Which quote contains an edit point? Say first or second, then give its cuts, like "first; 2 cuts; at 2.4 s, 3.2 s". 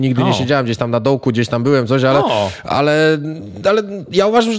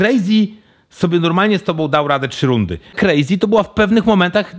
second; 1 cut; at 2.9 s